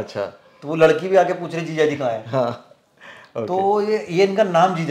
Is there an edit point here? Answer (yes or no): no